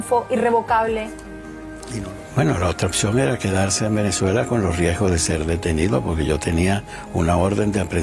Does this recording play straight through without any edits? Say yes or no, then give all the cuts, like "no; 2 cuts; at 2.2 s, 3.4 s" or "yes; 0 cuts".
no; 1 cut; at 1.7 s